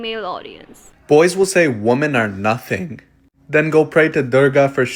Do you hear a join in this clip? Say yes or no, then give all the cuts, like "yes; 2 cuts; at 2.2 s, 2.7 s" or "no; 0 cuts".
no; 0 cuts